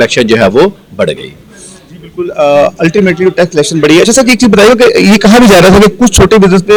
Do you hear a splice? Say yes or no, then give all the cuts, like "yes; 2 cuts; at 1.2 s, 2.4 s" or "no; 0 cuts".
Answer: no; 0 cuts